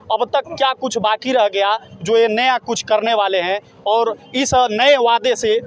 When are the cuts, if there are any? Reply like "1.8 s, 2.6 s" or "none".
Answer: none